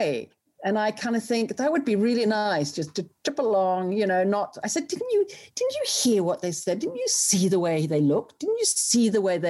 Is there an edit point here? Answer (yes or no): no